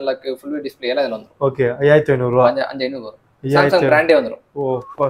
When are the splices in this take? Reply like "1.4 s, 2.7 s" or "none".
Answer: none